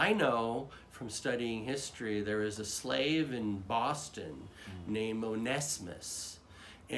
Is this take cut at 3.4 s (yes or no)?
no